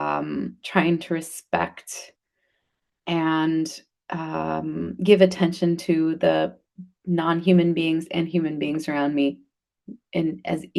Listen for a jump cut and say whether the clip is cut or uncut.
uncut